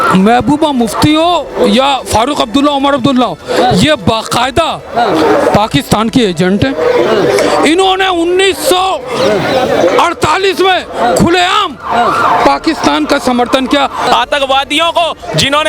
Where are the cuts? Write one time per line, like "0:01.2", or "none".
0:14.1